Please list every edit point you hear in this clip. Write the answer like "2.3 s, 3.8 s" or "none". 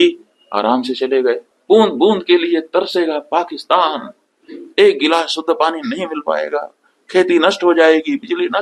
1.5 s